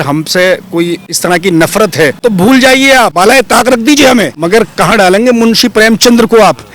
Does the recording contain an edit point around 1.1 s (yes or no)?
yes